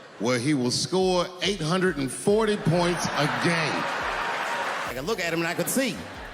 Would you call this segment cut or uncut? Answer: cut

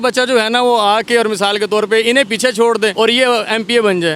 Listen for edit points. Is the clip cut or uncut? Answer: cut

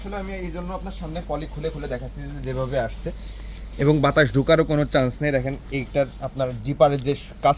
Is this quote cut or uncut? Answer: uncut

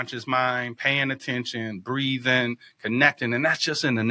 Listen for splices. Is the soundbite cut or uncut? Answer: uncut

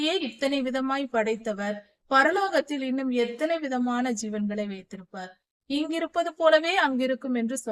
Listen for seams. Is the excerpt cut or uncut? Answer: uncut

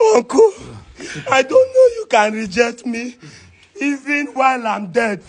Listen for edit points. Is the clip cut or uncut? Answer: uncut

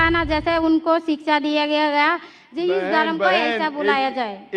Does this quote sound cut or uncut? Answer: uncut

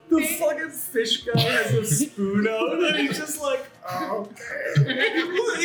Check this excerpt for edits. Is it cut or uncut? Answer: uncut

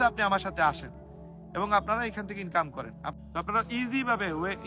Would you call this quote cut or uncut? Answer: cut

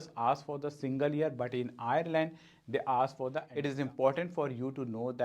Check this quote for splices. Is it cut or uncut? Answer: cut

